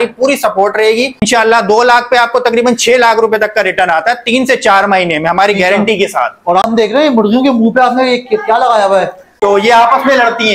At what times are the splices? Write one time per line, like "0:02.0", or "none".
0:01.2
0:06.6
0:09.4